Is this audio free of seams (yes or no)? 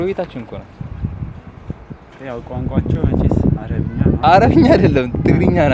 yes